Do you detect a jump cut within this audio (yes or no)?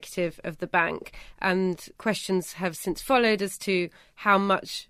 yes